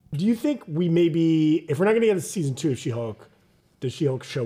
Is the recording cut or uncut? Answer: uncut